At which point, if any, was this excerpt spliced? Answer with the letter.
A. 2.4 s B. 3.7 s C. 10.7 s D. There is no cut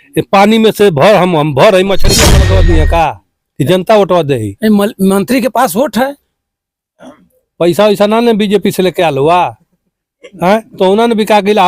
A